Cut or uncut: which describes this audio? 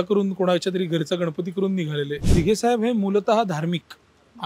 cut